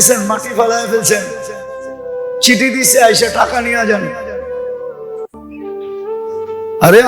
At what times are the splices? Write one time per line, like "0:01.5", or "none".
0:04.0
0:06.1